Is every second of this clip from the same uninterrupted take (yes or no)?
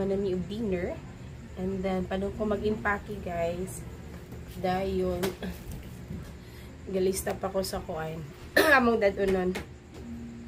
yes